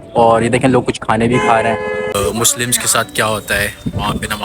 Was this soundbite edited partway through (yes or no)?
yes